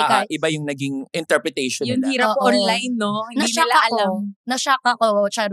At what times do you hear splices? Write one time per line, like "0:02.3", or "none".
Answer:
none